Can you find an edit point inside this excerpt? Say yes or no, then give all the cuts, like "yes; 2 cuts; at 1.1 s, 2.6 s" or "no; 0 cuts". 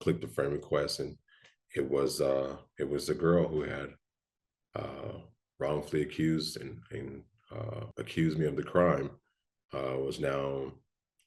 yes; 1 cut; at 7.9 s